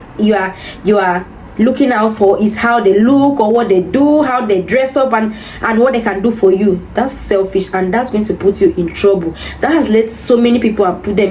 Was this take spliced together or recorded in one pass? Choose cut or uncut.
uncut